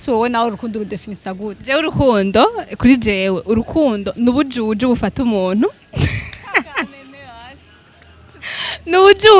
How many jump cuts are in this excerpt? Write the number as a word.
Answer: zero